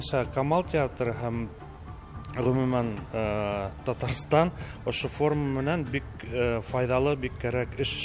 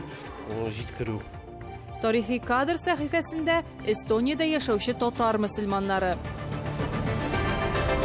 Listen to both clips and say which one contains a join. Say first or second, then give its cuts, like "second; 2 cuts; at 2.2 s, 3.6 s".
second; 1 cut; at 6.3 s